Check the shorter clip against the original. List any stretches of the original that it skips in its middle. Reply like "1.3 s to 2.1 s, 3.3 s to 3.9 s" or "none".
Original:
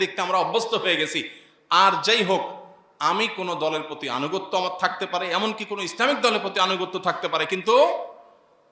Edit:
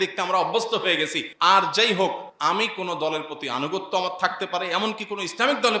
1.2 s to 1.5 s, 2.6 s to 2.9 s

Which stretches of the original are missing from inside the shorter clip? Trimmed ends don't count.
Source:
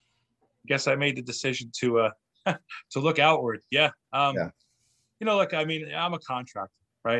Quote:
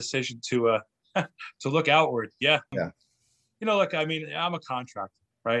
4.0 s to 4.3 s

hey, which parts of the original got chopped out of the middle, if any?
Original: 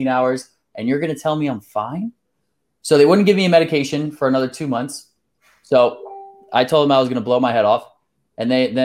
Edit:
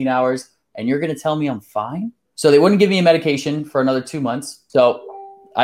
2.2 s to 2.7 s, 5.0 s to 5.5 s

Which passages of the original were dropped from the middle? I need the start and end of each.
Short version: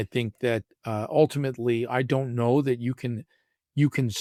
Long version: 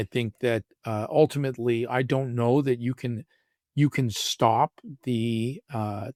none

